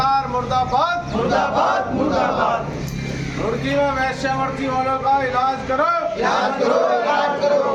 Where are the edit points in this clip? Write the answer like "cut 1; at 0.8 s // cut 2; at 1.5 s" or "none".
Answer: none